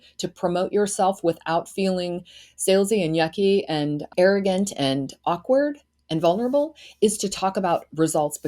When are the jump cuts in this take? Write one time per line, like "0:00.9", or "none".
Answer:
0:04.0